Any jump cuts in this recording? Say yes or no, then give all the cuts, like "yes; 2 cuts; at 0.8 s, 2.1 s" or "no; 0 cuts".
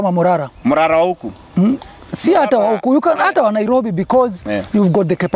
no; 0 cuts